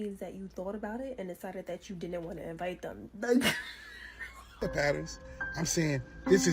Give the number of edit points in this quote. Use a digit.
1